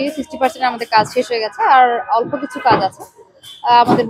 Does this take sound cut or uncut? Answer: uncut